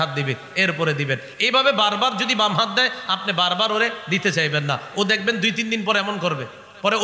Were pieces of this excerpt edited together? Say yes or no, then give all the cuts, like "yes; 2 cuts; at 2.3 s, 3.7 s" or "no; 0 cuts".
no; 0 cuts